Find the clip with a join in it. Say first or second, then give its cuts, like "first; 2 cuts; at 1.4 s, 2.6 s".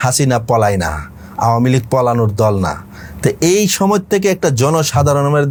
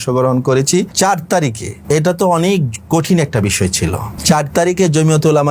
second; 3 cuts; at 0.9 s, 1.7 s, 4.1 s